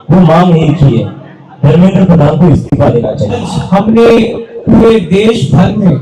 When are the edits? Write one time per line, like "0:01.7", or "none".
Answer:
0:03.5